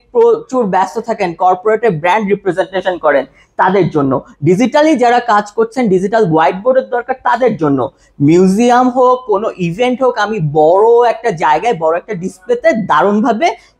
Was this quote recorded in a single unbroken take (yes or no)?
yes